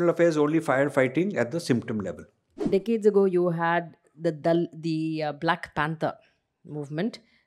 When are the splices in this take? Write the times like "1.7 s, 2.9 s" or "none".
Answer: 2.6 s